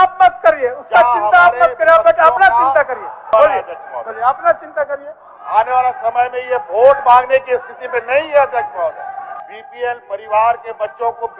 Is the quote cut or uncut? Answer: cut